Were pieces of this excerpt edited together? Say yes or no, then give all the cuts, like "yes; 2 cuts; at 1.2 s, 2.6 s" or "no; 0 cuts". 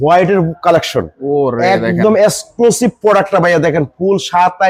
no; 0 cuts